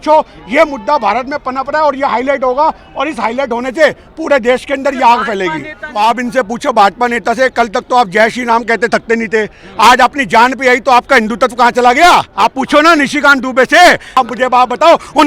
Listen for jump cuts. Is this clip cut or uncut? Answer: cut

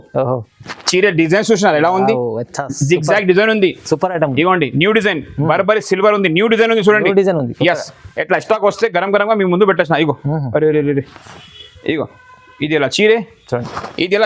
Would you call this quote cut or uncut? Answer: uncut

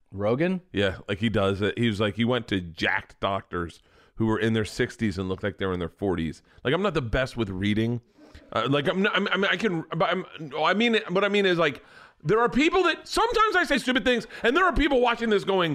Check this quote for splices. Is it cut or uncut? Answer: cut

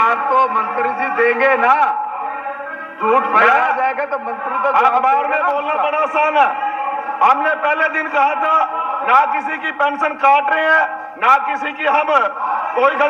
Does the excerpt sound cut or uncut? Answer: uncut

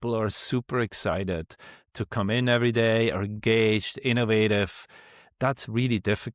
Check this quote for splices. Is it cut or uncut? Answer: uncut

